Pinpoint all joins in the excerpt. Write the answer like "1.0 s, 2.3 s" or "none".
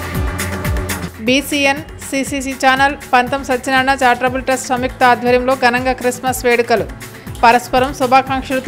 1.0 s